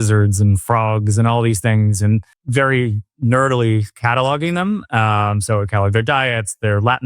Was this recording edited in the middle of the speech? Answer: yes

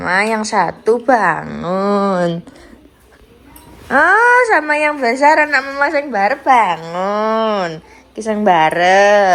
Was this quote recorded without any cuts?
yes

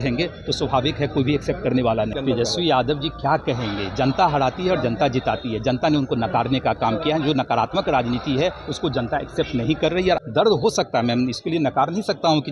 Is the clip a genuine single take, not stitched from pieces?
no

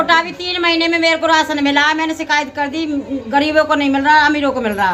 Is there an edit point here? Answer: no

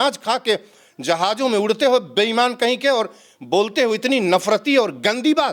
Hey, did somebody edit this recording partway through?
no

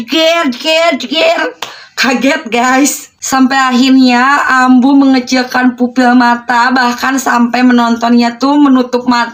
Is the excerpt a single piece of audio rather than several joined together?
yes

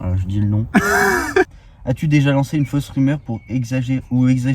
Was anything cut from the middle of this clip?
yes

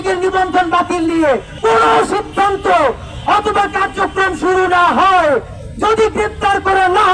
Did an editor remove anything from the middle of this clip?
yes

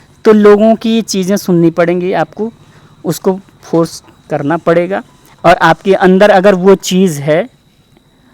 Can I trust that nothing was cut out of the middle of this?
yes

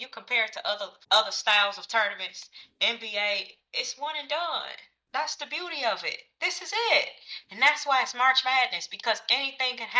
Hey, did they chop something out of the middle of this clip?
yes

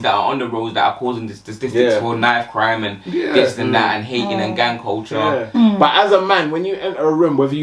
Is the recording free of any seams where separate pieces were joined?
no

